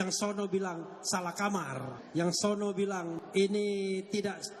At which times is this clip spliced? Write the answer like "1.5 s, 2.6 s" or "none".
2.0 s, 3.2 s